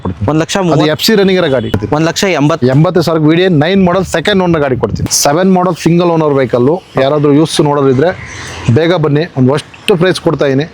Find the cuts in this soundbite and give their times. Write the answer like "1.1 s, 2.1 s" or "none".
1.8 s, 5.0 s